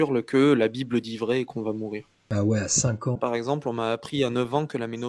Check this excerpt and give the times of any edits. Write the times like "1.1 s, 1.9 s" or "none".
2.1 s, 3.2 s